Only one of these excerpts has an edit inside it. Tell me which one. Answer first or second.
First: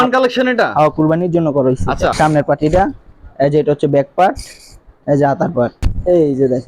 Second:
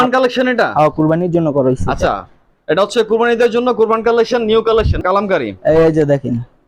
first